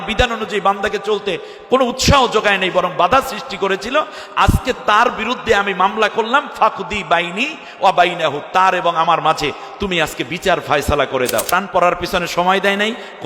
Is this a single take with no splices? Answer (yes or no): no